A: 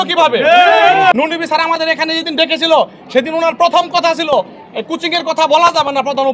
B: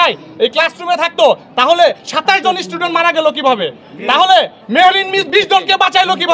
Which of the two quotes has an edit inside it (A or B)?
A